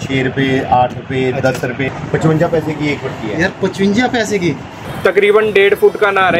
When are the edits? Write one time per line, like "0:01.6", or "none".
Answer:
0:01.9
0:04.8